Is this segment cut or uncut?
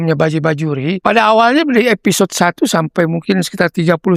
cut